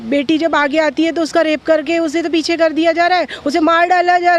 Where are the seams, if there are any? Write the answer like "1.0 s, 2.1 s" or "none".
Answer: none